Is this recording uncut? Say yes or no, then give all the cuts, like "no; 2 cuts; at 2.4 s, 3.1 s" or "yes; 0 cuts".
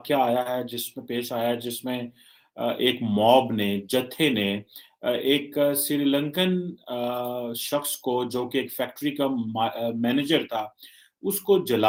yes; 0 cuts